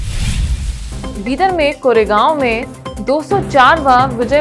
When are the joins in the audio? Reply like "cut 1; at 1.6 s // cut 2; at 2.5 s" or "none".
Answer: cut 1; at 0.9 s